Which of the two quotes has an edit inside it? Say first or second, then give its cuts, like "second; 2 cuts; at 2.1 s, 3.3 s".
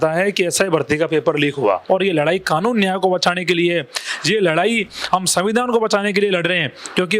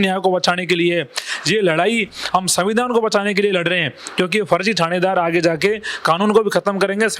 first; 1 cut; at 1.8 s